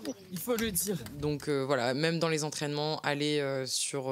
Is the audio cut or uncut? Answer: uncut